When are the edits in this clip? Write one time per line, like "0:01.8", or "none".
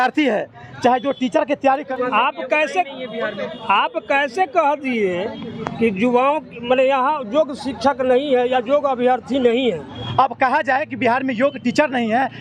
0:01.9
0:09.9